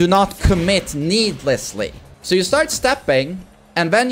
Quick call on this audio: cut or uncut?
cut